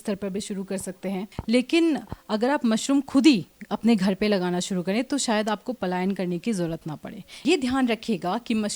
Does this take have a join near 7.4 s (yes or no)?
yes